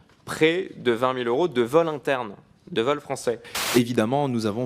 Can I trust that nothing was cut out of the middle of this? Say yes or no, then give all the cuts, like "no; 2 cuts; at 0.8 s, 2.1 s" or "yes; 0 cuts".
no; 1 cut; at 3.5 s